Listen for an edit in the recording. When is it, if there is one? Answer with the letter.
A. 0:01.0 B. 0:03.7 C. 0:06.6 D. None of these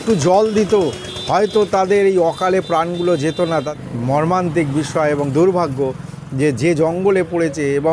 B